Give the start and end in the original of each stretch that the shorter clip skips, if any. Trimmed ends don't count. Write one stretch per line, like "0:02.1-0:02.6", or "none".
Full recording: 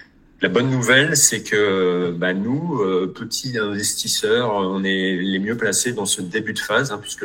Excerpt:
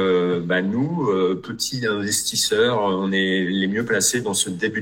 none

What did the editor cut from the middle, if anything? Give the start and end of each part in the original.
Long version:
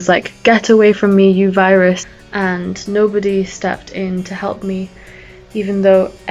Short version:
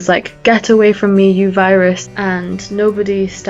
0:02.1-0:02.3

